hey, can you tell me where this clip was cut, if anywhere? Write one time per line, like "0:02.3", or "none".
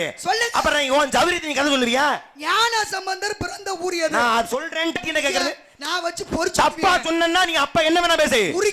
0:05.0